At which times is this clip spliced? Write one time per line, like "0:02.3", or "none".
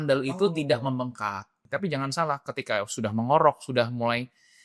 0:01.6